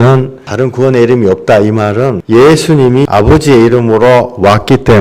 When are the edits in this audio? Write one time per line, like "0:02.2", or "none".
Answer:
0:02.2
0:03.0